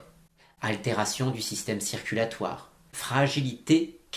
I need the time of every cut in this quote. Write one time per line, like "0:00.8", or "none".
0:02.9